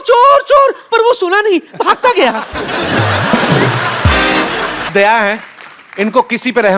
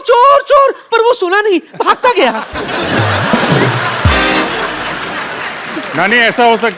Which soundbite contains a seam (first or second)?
first